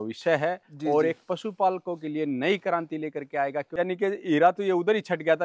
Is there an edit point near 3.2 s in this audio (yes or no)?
no